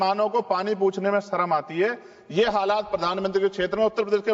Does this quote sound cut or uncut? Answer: uncut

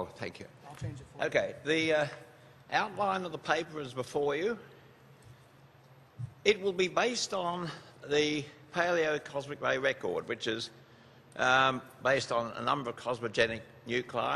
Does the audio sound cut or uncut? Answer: uncut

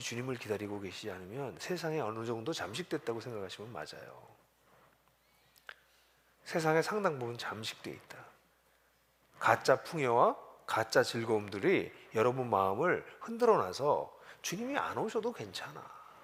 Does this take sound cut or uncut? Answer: uncut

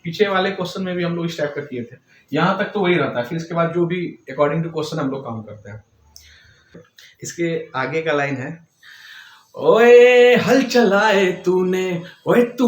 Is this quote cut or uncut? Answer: cut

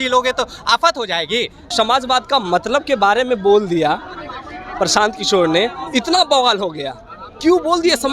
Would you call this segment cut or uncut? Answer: cut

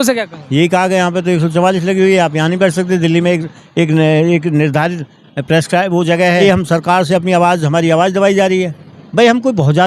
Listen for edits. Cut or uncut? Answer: cut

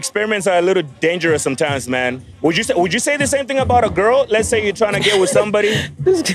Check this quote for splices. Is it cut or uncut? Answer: cut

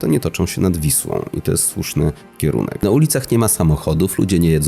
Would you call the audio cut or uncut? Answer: cut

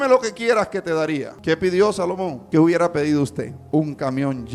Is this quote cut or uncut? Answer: cut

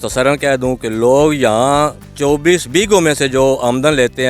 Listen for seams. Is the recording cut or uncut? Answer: cut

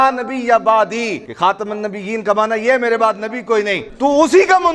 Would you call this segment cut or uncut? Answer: cut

